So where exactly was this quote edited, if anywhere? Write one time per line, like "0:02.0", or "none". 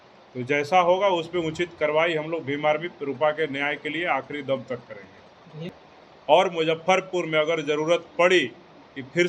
0:05.6